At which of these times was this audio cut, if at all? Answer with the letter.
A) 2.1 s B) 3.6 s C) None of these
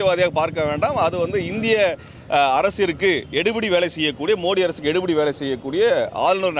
C